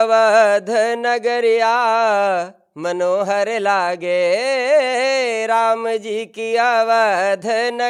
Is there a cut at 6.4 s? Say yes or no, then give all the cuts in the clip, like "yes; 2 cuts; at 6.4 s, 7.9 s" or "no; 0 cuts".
no; 0 cuts